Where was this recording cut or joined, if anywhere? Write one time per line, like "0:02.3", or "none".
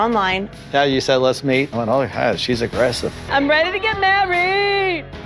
0:01.7
0:03.1